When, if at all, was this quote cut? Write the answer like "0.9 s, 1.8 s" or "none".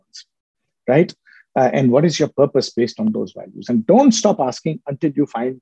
none